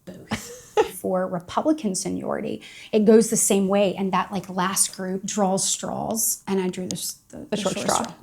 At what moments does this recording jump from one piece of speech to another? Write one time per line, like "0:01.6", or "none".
0:01.0
0:05.3
0:06.3